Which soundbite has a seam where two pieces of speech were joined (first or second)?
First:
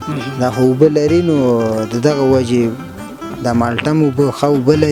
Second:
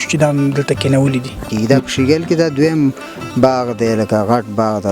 second